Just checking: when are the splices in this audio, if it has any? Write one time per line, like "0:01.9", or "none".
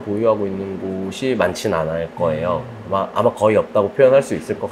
none